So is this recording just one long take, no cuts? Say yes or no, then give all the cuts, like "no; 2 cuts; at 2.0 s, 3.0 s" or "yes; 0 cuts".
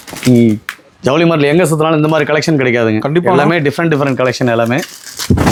yes; 0 cuts